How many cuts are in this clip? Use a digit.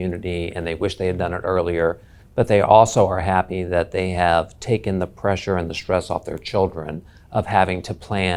0